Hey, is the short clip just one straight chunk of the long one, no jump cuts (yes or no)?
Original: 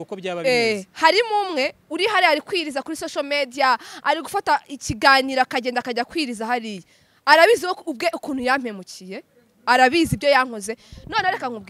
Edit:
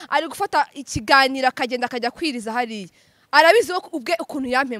yes